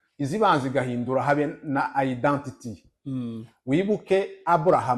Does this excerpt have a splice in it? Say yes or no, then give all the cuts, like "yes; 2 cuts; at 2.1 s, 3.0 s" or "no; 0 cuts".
no; 0 cuts